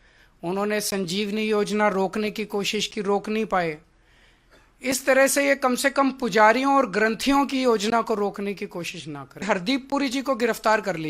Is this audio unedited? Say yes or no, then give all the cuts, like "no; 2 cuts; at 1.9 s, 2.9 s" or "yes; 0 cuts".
no; 1 cut; at 9.5 s